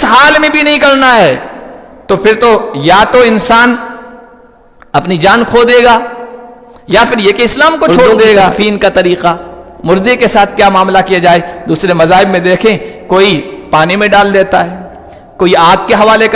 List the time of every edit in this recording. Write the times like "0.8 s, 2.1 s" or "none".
8.5 s